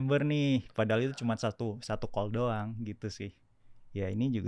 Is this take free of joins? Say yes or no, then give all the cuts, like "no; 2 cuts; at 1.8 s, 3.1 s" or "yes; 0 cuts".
yes; 0 cuts